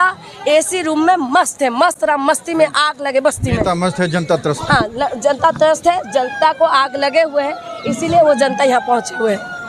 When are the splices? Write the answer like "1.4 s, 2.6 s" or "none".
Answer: none